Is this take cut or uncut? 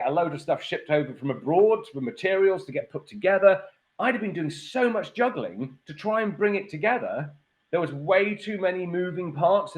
cut